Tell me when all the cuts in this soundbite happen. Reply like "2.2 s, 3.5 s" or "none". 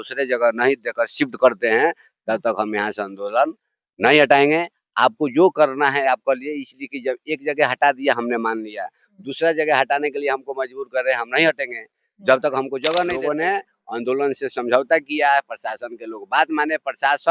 13.1 s